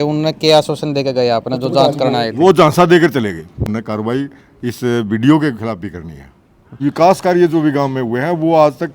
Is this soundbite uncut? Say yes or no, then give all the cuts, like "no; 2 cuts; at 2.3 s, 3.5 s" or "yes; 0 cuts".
no; 2 cuts; at 3.7 s, 6.7 s